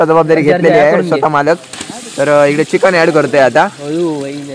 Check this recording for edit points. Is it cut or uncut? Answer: uncut